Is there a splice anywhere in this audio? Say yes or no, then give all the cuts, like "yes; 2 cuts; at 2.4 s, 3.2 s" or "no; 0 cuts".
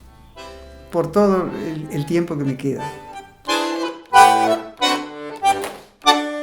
yes; 1 cut; at 3.4 s